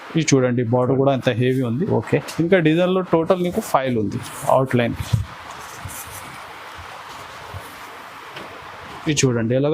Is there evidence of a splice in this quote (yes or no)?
no